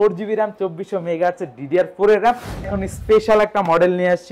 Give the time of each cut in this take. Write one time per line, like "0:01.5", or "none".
0:02.7